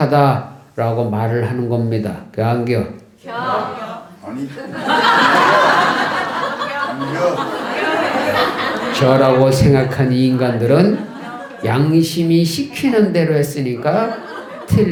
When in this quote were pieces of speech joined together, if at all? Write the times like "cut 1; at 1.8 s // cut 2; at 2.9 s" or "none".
none